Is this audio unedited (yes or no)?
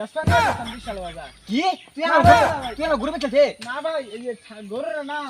yes